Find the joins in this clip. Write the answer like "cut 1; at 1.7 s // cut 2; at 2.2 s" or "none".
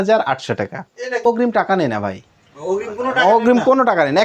cut 1; at 1.2 s